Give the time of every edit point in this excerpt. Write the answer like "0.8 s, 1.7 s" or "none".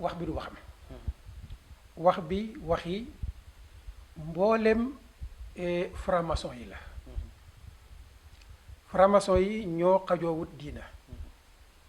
none